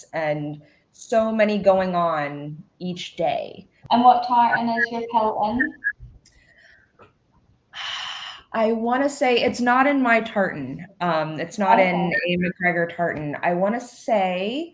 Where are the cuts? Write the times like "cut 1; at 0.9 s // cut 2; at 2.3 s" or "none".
cut 1; at 3.7 s